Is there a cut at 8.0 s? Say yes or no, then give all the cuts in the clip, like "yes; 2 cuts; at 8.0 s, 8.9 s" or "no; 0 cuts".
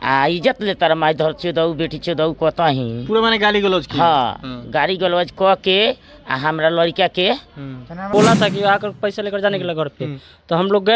yes; 1 cut; at 8.0 s